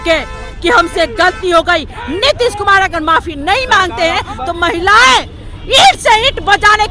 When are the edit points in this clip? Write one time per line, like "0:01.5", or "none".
none

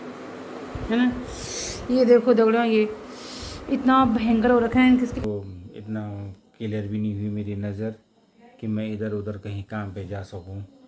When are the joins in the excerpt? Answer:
0:05.2

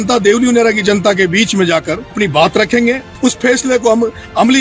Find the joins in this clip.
0:02.1
0:03.1

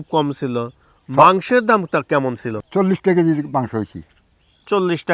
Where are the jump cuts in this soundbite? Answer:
0:02.5

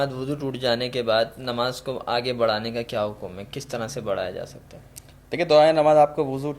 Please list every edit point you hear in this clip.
none

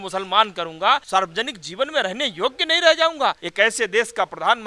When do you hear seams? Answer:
0:01.0
0:03.4

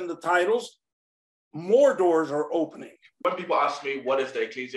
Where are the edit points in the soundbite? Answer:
0:03.2

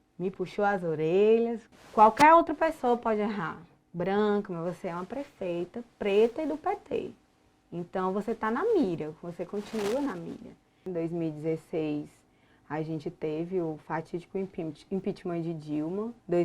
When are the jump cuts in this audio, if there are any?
0:01.6
0:10.8

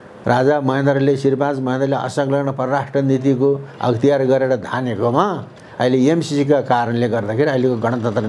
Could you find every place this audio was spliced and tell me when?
none

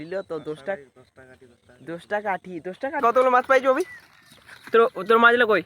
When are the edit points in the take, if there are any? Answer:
0:03.0

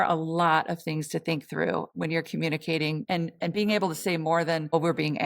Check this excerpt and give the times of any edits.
0:01.9
0:03.1

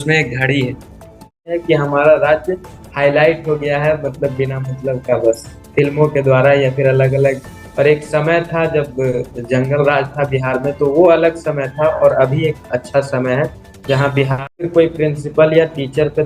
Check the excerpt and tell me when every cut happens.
0:01.6
0:14.5

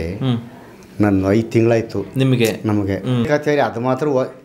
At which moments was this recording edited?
0:03.3

